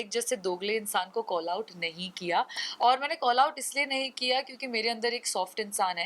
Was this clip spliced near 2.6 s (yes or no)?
no